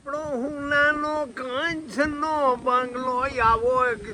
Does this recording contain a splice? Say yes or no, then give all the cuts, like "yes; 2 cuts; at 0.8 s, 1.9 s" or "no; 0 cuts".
no; 0 cuts